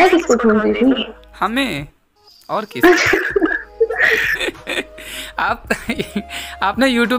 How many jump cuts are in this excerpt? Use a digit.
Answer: 0